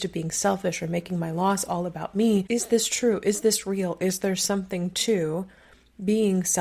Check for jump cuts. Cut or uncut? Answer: cut